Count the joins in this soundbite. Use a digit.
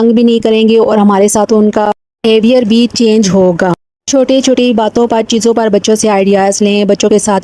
0